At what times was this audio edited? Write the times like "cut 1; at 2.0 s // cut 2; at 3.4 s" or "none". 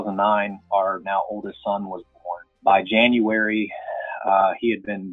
cut 1; at 2.4 s